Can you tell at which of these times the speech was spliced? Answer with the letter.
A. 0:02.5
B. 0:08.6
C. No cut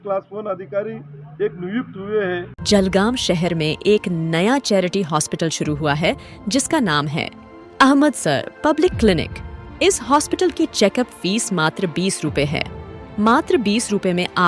A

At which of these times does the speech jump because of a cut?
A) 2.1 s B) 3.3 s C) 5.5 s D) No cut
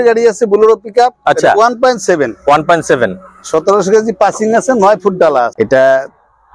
C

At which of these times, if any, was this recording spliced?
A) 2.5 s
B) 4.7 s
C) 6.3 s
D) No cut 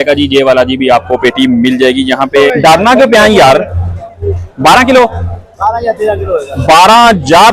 A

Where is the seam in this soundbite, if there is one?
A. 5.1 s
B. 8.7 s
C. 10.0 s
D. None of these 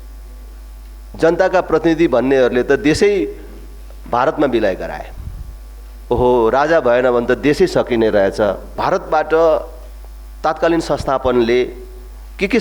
B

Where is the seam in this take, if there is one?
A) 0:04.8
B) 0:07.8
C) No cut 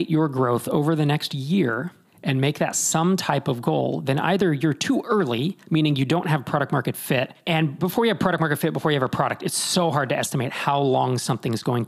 B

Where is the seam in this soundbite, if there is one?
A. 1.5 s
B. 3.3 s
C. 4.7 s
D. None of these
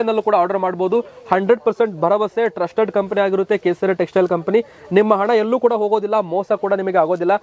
D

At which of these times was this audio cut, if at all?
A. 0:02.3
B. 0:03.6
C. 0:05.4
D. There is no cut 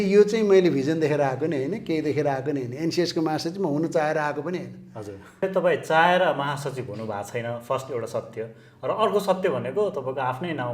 C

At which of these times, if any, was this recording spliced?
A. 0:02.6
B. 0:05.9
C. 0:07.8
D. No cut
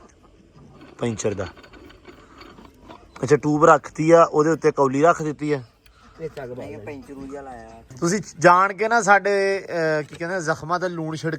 C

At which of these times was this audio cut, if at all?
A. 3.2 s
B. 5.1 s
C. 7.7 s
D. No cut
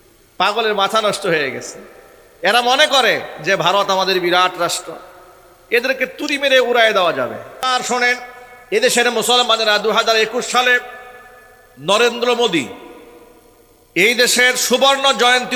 C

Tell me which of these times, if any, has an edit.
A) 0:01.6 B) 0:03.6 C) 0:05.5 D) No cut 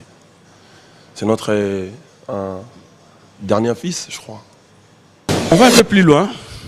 C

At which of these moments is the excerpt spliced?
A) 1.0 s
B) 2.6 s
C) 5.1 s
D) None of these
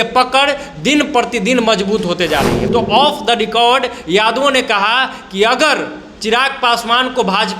B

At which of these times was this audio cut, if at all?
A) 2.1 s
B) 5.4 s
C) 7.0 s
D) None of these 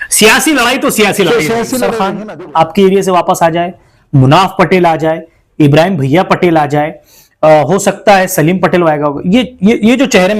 A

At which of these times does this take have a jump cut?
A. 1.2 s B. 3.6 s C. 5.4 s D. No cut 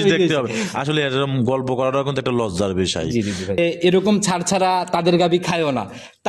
B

